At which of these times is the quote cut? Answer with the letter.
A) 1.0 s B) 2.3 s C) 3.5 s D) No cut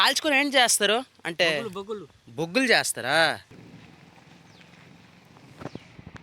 C